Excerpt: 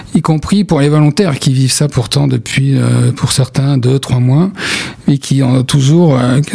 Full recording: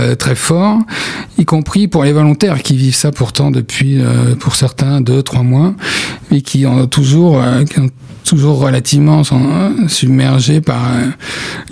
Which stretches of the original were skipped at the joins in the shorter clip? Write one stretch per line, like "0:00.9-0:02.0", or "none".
none